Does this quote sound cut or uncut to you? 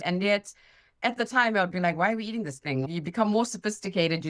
cut